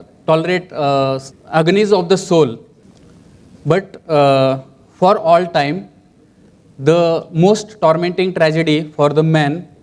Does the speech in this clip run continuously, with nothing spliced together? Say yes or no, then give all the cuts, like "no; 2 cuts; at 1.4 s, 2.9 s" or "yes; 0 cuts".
no; 1 cut; at 1.3 s